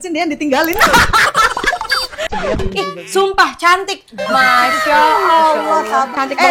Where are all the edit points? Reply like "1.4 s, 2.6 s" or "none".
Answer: 2.3 s